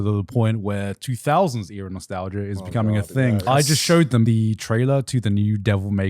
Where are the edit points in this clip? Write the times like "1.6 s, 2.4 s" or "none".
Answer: 3.4 s, 4.3 s